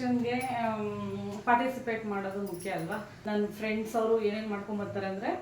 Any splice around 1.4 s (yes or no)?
no